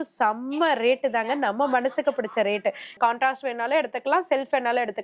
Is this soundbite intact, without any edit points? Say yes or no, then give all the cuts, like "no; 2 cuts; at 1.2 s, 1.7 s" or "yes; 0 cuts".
no; 1 cut; at 2.9 s